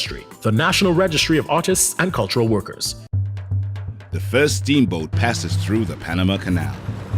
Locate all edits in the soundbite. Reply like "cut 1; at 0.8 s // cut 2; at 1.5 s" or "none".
cut 1; at 2.9 s